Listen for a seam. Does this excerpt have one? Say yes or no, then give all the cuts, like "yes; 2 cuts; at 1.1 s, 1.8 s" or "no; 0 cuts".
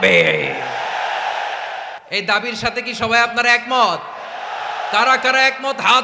yes; 1 cut; at 2.0 s